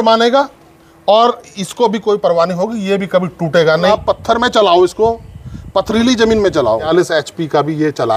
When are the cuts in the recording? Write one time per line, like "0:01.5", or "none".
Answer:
0:03.9
0:06.9